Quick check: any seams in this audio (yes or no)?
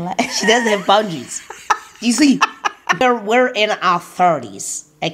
yes